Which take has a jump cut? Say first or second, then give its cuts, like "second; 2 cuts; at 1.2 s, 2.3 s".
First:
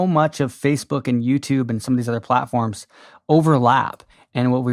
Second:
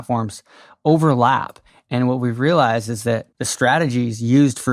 second; 1 cut; at 3.3 s